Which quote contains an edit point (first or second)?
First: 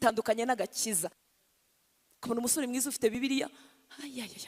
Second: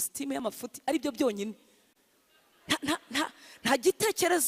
first